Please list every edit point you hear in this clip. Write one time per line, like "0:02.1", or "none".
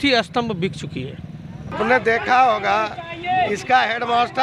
0:01.7